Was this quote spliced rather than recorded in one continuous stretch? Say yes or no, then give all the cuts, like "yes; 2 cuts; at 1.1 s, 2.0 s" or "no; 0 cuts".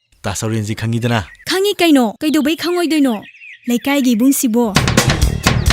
yes; 1 cut; at 1.4 s